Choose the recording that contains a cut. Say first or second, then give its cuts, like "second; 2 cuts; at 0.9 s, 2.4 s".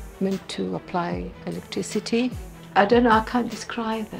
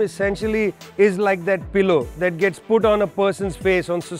first; 1 cut; at 2.5 s